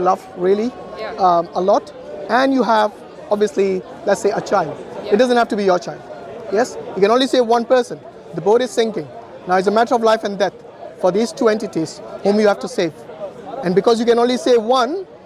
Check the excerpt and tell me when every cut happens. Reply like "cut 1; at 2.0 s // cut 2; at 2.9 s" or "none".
none